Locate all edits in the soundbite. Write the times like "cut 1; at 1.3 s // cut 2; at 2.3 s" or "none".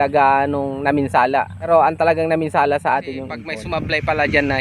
cut 1; at 1.7 s // cut 2; at 3.5 s